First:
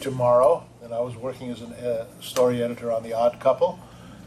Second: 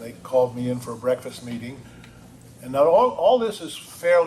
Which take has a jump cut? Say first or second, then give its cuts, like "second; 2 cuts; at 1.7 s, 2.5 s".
second; 1 cut; at 1.3 s